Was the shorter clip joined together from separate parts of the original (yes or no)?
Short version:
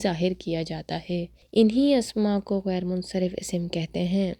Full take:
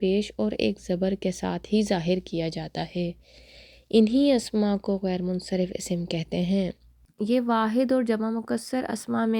yes